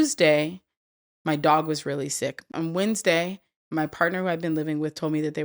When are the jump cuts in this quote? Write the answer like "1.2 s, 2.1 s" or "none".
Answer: 2.5 s

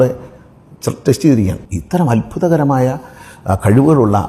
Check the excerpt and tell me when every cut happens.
1.6 s

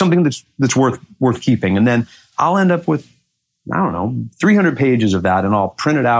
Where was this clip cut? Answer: none

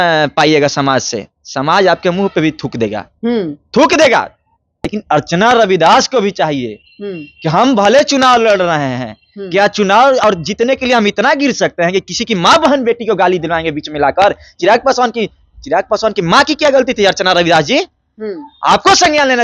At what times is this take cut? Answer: 4.9 s

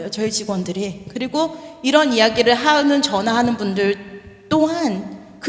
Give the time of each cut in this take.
none

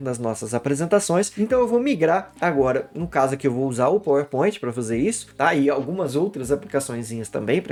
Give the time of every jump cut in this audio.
none

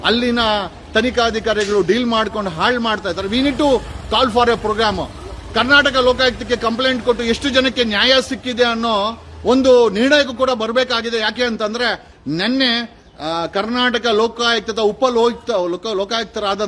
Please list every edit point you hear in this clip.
none

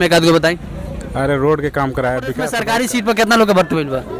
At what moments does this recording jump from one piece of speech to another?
2.6 s

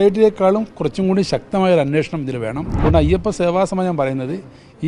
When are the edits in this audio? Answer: 2.7 s

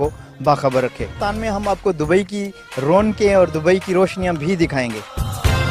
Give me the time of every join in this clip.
1.3 s

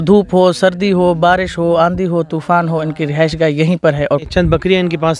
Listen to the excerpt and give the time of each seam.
4.3 s

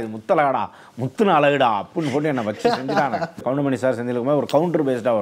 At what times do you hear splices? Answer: 3.4 s

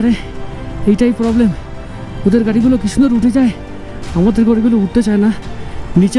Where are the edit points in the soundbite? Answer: none

